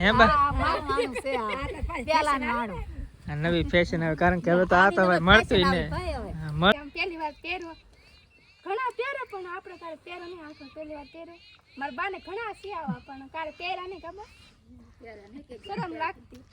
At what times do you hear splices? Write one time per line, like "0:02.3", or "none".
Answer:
0:06.7